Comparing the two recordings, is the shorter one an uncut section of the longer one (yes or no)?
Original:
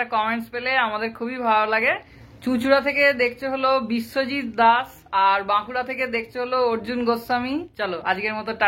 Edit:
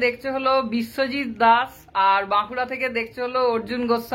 yes